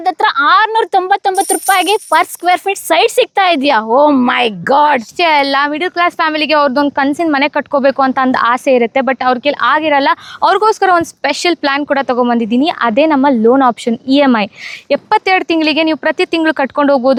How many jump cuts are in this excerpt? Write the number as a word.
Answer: zero